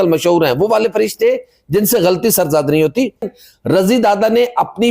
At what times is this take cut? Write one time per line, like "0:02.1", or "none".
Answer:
0:03.3